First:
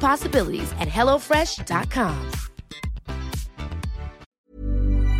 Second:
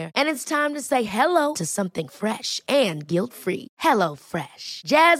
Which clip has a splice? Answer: first; 1 cut; at 4.3 s

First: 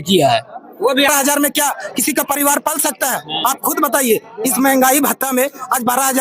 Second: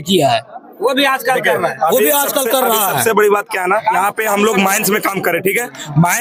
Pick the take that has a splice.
first; 1 cut; at 1.1 s

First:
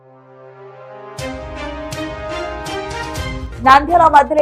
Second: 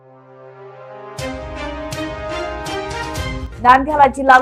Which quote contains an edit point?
second; 1 cut; at 3.4 s

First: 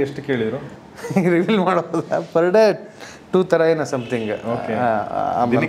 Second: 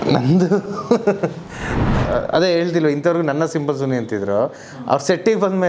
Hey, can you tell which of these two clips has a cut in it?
second; 1 cut; at 2.0 s

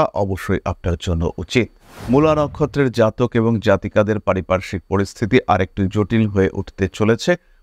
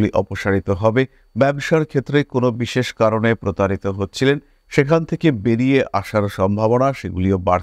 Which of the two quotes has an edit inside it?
first; 1 cut; at 1.9 s

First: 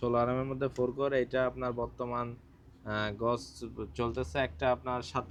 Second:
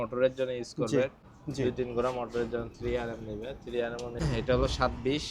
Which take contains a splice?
second; 2 cuts; at 1.3 s, 4.2 s

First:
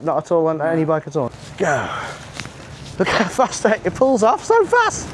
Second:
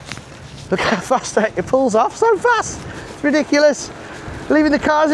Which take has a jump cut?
first; 1 cut; at 1.3 s

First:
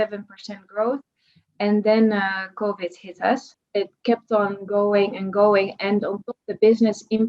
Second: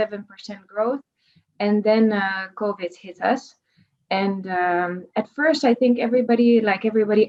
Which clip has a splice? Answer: first; 1 cut; at 3.6 s

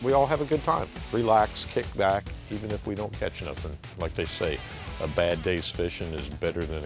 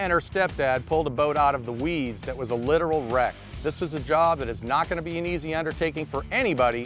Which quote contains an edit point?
first; 1 cut; at 0.9 s

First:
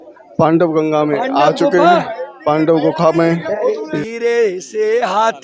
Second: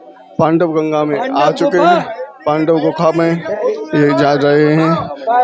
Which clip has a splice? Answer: first; 1 cut; at 3.9 s

